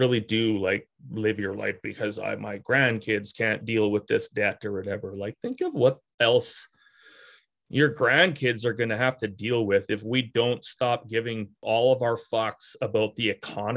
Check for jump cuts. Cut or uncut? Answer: uncut